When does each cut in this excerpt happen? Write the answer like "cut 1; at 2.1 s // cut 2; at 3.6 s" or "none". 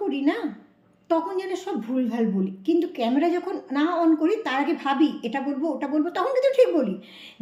none